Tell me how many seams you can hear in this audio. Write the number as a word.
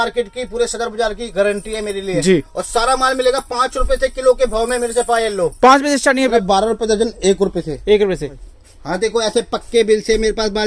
two